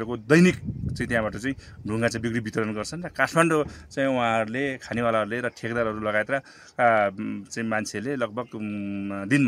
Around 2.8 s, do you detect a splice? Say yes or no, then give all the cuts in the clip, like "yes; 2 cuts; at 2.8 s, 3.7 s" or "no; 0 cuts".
no; 0 cuts